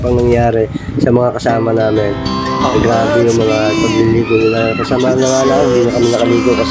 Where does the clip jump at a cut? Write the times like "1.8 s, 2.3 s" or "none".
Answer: none